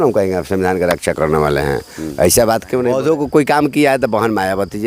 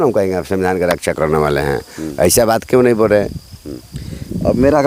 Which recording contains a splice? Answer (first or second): first